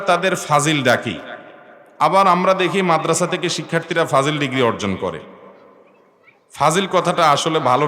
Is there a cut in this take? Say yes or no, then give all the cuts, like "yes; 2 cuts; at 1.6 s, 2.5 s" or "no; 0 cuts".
no; 0 cuts